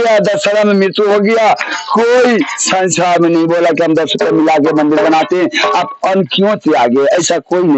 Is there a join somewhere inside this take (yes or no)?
no